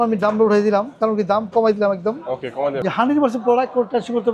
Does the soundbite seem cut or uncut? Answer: cut